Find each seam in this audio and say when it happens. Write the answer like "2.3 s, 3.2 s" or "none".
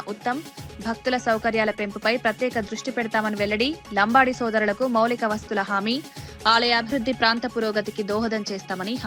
none